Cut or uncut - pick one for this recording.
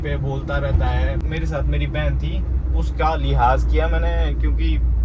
cut